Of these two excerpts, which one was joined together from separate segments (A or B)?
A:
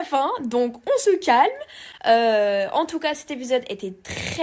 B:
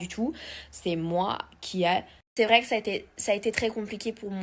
B